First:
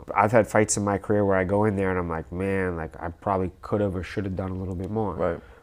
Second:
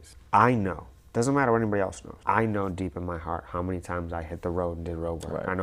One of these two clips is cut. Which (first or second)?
second